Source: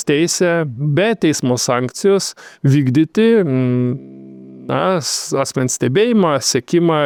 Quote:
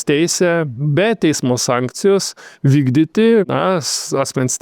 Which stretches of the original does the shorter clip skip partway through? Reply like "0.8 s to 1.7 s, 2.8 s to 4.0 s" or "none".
3.5 s to 4.7 s